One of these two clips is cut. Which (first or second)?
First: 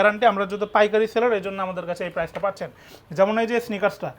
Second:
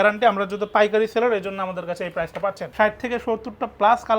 second